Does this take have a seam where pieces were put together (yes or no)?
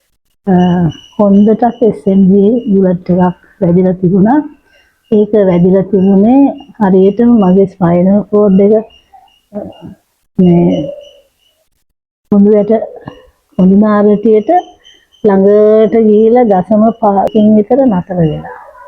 yes